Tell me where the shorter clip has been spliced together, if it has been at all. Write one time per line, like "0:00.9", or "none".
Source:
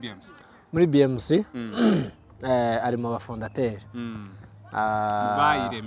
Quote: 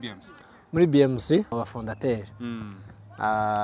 0:01.5